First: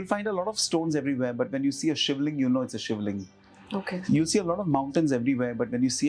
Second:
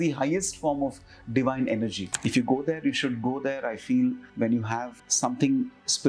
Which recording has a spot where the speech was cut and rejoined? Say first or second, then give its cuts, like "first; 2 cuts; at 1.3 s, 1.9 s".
second; 3 cuts; at 2.1 s, 4.3 s, 5.0 s